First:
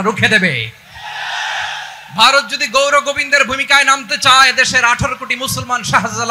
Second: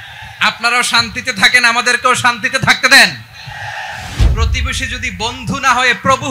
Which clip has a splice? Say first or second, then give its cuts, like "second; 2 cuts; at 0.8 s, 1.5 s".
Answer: second; 1 cut; at 4.2 s